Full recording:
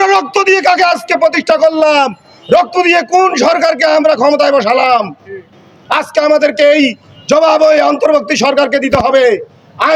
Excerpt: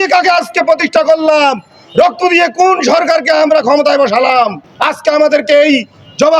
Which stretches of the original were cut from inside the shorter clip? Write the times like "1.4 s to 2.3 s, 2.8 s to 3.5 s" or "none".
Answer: 5.2 s to 5.7 s